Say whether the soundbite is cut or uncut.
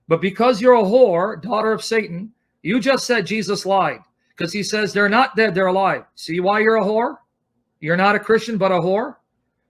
cut